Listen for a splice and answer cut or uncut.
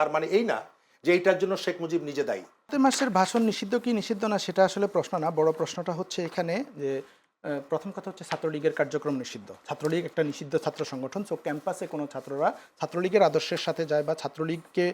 cut